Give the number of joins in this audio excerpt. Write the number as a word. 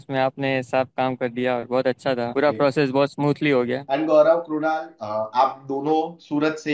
two